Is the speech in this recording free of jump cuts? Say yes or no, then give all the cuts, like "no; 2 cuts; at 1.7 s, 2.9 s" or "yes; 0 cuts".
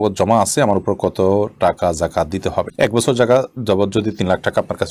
yes; 0 cuts